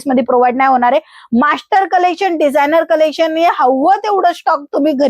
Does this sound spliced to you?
no; 0 cuts

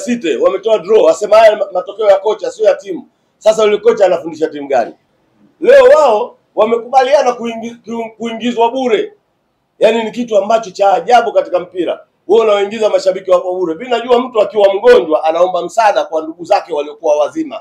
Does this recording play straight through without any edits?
no; 1 cut; at 5.0 s

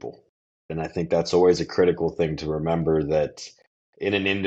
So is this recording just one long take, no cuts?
yes; 0 cuts

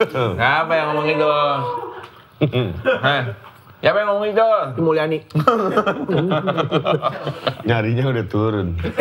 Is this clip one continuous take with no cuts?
yes; 0 cuts

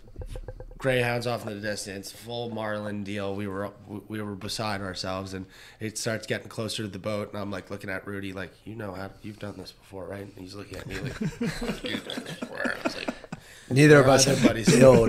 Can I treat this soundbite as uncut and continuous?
yes; 0 cuts

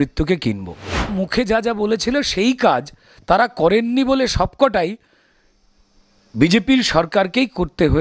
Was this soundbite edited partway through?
yes; 1 cut; at 1.1 s

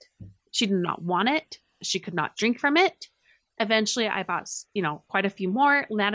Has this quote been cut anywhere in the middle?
yes; 1 cut; at 1.8 s

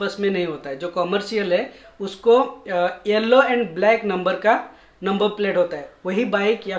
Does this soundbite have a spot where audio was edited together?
no; 0 cuts

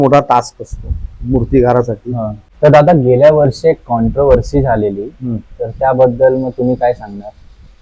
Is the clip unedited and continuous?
no; 1 cut; at 2.4 s

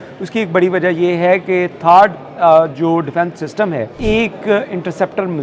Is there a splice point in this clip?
yes; 1 cut; at 3.9 s

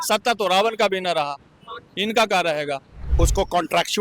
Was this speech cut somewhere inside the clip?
yes; 1 cut; at 3.0 s

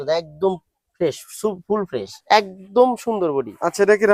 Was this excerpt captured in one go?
no; 1 cut; at 2.1 s

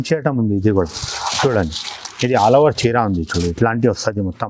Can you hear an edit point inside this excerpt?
no; 0 cuts

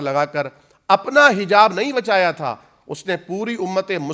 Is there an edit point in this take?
no; 0 cuts

